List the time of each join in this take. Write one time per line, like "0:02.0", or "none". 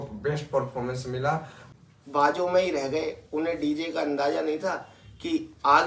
0:01.6